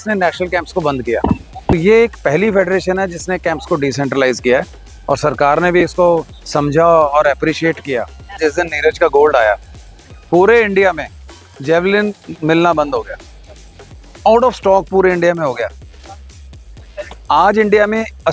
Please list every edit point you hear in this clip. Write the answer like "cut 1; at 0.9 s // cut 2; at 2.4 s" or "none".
cut 1; at 1.7 s // cut 2; at 8.4 s